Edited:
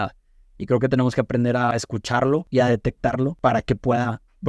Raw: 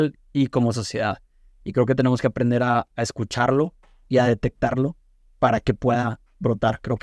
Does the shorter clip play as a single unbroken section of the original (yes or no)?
no